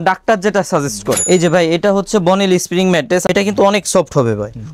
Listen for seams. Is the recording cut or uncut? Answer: cut